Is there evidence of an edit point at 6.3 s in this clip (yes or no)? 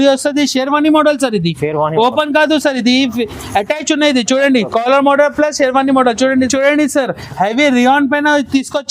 yes